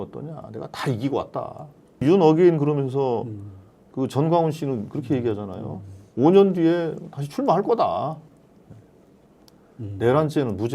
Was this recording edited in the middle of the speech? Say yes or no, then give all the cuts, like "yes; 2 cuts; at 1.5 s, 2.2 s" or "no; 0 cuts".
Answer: yes; 1 cut; at 2.0 s